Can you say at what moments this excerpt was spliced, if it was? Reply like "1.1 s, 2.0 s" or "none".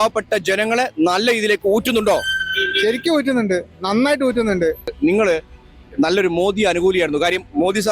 4.9 s